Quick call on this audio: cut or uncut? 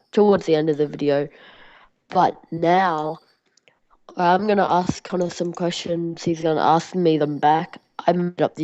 cut